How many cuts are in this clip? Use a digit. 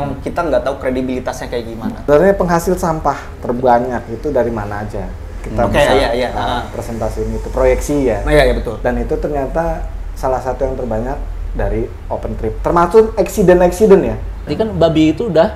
2